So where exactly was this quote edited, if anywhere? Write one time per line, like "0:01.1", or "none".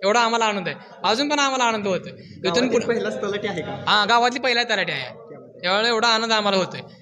none

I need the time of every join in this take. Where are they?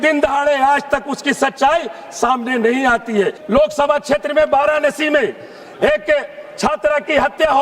0:03.4

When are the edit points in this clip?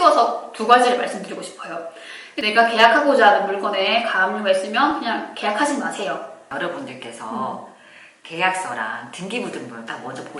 0:02.4
0:06.4

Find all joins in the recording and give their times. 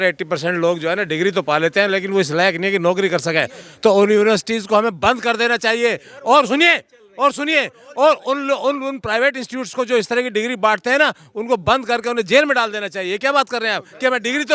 none

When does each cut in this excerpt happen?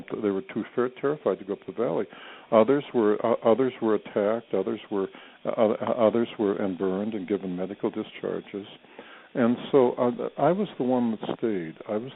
0:05.3

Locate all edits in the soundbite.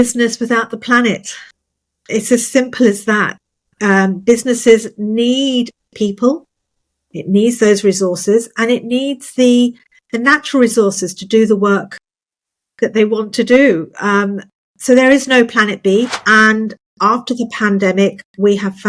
0:16.1

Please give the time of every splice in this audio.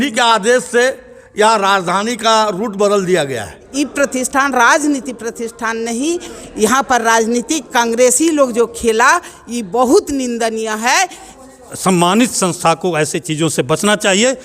0:03.6
0:11.1

